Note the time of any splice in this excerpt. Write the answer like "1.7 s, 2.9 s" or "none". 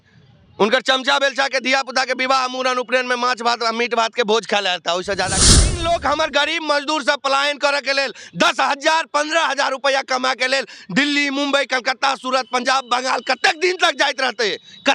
5.5 s